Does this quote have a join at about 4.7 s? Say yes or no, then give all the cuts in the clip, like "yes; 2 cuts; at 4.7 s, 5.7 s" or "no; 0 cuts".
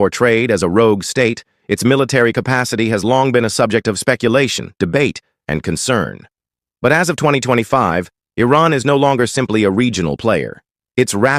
no; 0 cuts